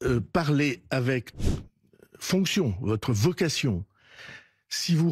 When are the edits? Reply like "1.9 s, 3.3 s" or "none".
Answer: 1.3 s